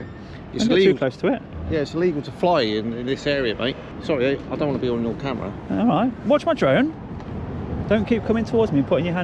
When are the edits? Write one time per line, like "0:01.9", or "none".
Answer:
0:03.9